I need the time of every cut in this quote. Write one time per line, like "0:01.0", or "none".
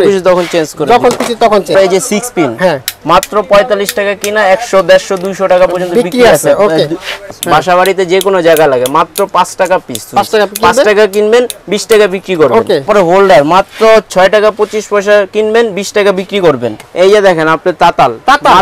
0:01.7
0:07.2
0:12.9
0:16.9